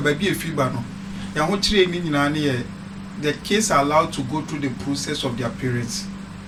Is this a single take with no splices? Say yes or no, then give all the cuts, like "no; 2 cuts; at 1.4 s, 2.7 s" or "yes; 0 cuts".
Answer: yes; 0 cuts